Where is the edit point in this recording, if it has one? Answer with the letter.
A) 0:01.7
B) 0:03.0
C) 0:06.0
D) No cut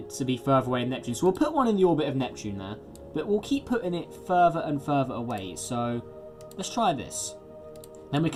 D